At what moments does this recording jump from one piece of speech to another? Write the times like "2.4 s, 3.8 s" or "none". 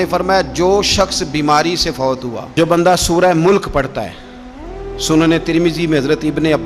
2.5 s